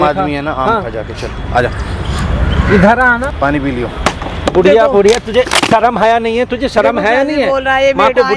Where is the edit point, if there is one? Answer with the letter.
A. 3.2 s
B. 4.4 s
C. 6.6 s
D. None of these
A